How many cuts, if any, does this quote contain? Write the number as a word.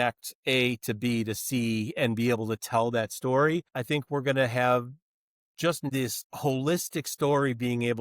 two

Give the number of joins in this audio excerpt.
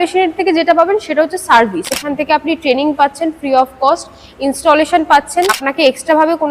two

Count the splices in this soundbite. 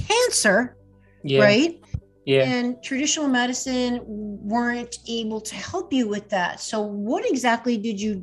zero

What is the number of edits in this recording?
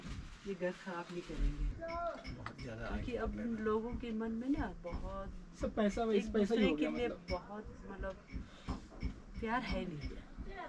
one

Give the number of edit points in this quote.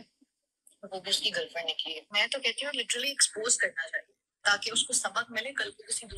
one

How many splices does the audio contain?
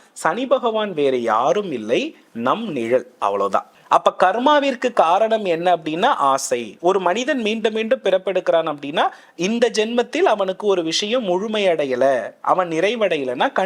one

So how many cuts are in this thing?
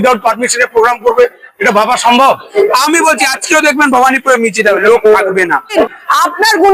two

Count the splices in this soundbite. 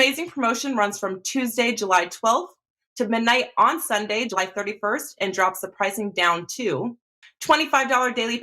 one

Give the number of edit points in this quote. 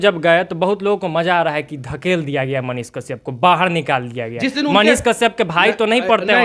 zero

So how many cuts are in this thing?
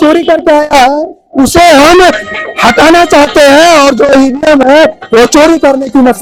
zero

